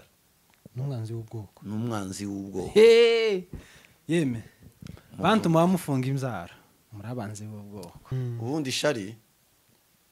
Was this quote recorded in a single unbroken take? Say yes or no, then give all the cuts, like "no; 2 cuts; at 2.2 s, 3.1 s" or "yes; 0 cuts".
no; 1 cut; at 8.0 s